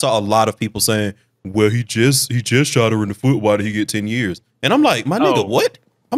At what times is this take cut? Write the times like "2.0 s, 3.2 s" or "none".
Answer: none